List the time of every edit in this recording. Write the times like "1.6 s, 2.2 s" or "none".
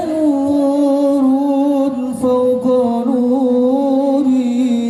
none